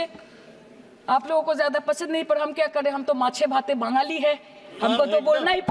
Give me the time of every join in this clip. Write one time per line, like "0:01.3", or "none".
none

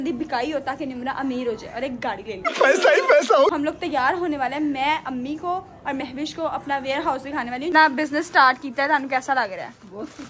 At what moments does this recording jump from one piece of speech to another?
0:03.5
0:07.7

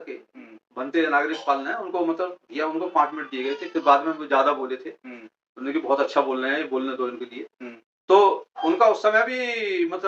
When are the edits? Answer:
none

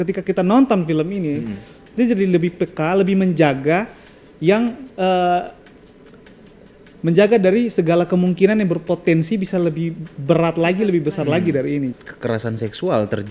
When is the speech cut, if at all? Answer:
0:11.9

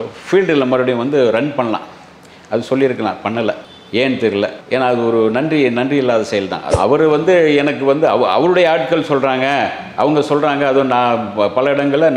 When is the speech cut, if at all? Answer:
0:06.6

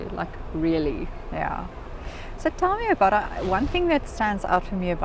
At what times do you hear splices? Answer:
none

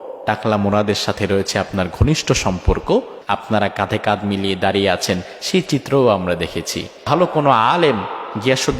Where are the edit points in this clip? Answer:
0:03.2
0:07.0

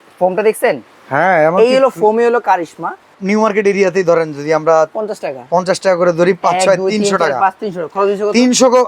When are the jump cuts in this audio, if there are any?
0:03.2

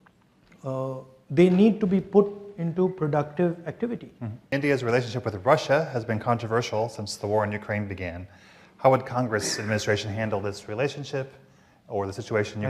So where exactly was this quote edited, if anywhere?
0:04.5

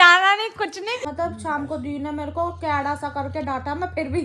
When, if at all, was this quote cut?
0:01.1

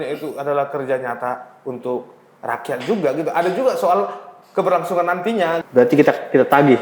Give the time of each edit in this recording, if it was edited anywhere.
0:05.6

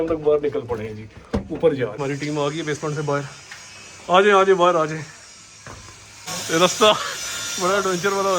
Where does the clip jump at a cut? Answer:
0:02.0
0:06.3

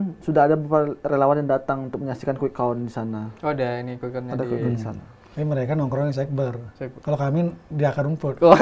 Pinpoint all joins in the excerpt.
none

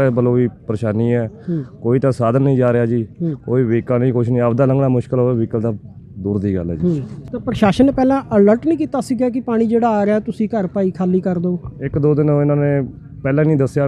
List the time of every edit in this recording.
0:07.2

